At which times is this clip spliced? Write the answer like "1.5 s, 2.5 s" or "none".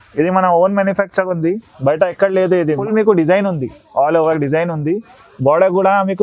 2.8 s